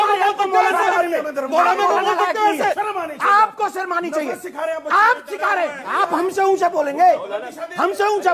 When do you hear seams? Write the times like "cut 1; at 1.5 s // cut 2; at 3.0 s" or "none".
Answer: cut 1; at 2.8 s // cut 2; at 5.8 s